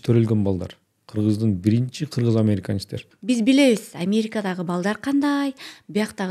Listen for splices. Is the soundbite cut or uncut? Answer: cut